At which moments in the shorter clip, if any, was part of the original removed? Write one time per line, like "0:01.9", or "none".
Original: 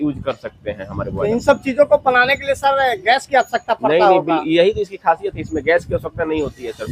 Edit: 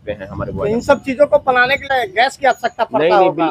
0:01.9